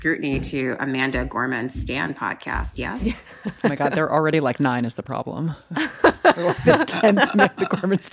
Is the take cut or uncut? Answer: uncut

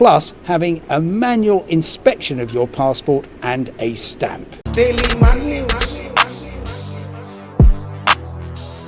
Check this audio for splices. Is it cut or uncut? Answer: cut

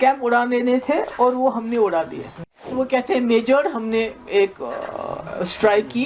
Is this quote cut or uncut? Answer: cut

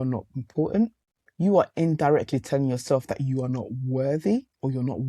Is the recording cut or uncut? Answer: cut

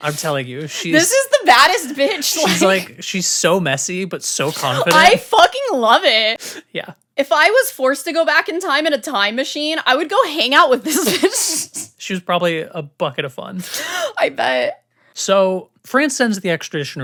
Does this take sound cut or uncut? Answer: uncut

